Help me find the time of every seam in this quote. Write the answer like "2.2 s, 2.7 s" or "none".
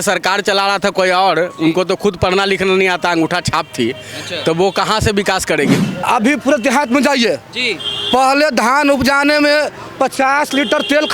5.8 s